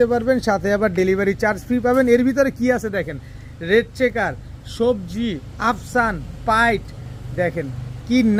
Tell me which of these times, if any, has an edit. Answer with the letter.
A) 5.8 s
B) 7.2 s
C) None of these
C